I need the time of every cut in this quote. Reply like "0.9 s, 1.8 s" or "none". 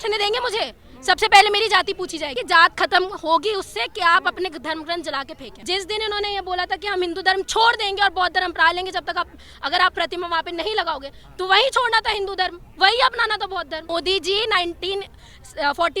2.3 s, 5.5 s, 13.9 s